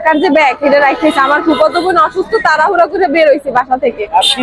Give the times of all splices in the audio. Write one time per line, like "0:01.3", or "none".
none